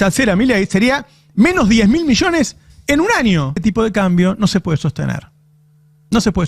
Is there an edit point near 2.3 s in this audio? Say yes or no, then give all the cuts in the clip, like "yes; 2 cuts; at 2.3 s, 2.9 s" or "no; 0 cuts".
no; 1 cut; at 3.6 s